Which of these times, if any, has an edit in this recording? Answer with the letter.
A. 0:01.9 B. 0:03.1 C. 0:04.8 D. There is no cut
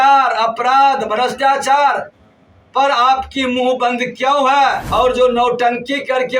C